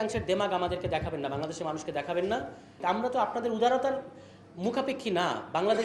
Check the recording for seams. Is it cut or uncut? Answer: cut